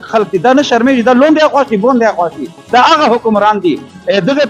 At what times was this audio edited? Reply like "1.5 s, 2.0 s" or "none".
none